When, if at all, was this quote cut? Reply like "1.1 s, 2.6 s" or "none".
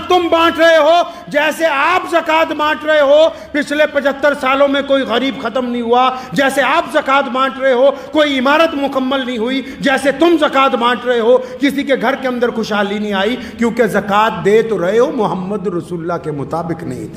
none

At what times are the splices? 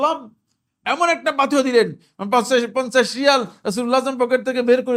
none

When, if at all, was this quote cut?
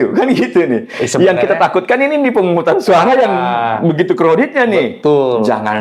none

